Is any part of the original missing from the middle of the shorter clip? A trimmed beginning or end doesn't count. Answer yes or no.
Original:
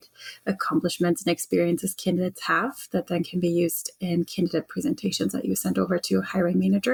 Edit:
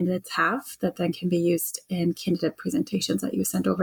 no